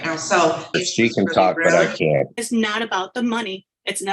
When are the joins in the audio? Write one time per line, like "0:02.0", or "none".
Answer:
0:00.8
0:02.4